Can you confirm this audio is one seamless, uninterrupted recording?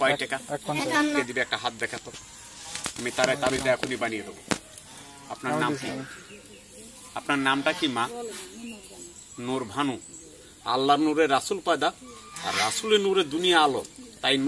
no; 1 cut; at 1.2 s

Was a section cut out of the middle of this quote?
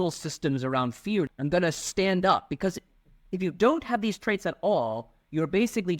yes; 1 cut; at 1.3 s

